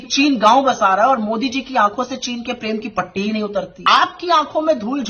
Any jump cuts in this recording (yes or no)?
yes